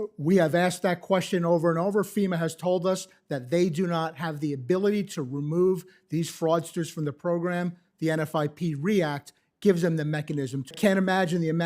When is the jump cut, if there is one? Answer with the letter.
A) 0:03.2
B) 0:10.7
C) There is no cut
B